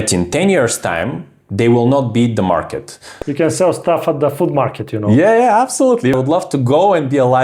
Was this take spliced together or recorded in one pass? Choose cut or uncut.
cut